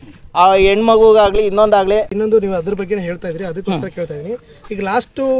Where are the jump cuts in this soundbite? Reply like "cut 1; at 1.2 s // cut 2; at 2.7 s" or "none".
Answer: cut 1; at 2.2 s